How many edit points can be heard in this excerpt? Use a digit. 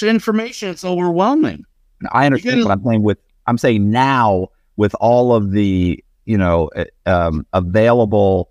0